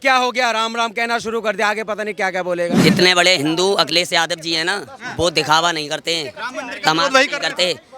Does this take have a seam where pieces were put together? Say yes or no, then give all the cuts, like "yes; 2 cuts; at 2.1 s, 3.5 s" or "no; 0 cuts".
yes; 1 cut; at 2.8 s